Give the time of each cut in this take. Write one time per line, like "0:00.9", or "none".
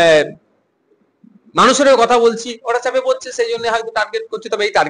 none